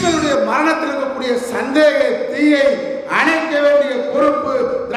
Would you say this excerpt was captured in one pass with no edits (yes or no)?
yes